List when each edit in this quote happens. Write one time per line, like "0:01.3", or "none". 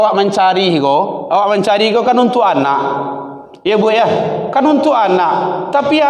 none